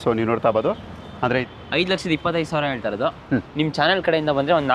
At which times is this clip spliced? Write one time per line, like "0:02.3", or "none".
0:01.5